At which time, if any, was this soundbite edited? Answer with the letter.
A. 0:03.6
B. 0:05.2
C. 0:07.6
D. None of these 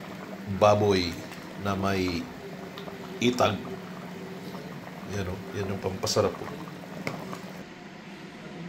C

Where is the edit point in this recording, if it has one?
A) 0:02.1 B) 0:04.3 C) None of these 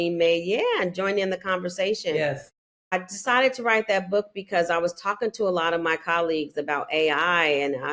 A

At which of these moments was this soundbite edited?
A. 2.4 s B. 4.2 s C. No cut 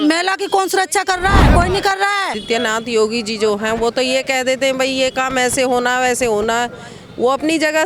A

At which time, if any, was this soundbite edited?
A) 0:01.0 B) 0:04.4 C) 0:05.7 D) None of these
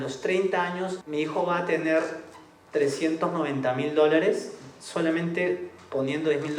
A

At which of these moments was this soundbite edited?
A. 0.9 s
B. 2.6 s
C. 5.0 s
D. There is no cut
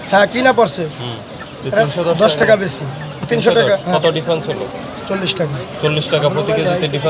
D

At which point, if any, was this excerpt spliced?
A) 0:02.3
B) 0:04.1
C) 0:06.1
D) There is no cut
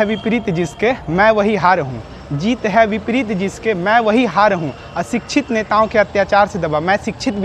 D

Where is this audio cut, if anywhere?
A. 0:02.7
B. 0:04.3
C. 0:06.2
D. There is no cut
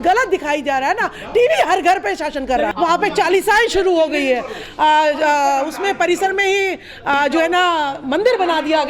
A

